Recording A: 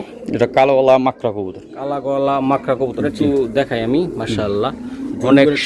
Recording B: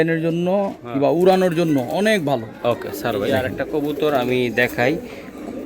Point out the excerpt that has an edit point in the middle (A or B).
B